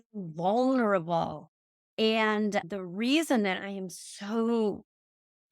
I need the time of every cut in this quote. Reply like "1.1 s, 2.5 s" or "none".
2.6 s